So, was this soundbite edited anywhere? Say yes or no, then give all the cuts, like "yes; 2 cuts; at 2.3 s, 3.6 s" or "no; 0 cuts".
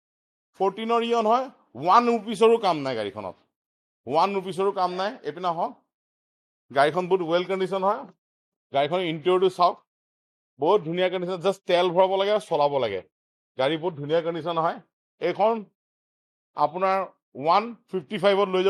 no; 0 cuts